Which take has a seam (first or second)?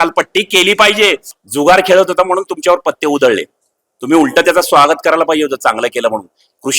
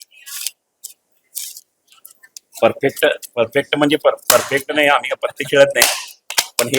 first